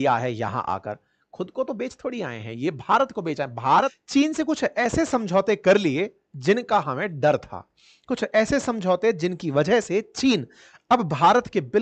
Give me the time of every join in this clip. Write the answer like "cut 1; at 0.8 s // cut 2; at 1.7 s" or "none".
cut 1; at 4.0 s

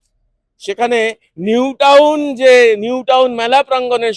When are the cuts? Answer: none

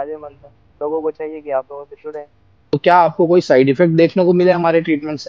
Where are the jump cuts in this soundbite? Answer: cut 1; at 2.6 s

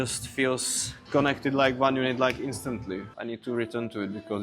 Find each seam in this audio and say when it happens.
cut 1; at 3.1 s

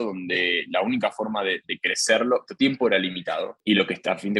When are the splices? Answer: cut 1; at 2.5 s // cut 2; at 3.5 s

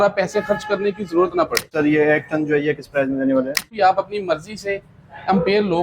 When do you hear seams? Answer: cut 1; at 1.7 s // cut 2; at 3.6 s

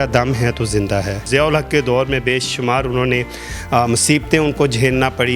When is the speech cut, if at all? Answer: cut 1; at 1.2 s

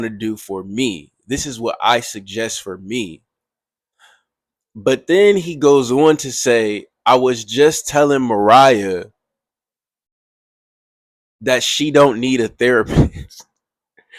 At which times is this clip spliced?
none

